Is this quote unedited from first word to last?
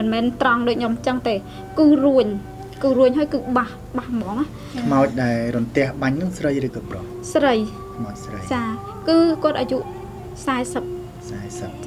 yes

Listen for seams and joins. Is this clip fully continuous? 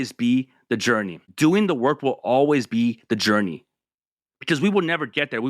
no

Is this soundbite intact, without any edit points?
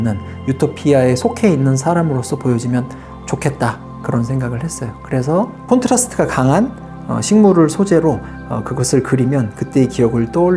yes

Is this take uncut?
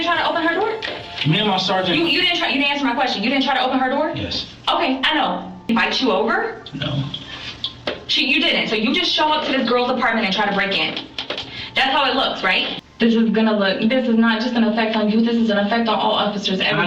no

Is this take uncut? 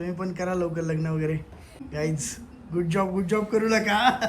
no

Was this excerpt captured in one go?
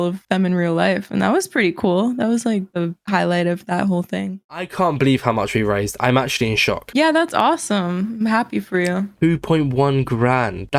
no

